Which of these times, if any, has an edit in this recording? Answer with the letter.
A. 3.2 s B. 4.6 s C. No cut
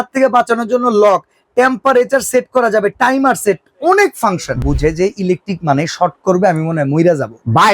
B